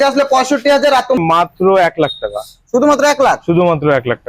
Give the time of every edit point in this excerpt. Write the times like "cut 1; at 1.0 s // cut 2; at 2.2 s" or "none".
cut 1; at 1.2 s